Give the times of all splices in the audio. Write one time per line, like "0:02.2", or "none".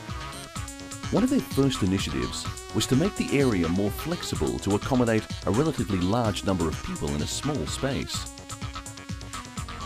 0:08.7